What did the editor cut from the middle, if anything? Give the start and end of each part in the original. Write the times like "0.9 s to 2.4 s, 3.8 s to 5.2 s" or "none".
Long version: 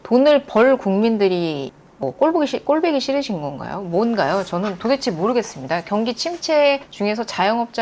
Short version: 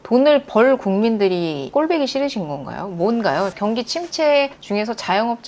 1.7 s to 2.6 s, 4.5 s to 5.8 s